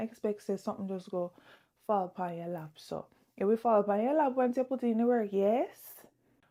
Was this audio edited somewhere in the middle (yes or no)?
no